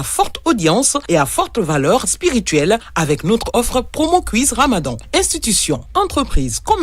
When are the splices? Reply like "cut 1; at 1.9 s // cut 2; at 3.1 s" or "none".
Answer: cut 1; at 3.5 s